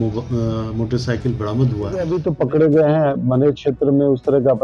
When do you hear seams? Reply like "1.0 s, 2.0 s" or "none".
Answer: 2.1 s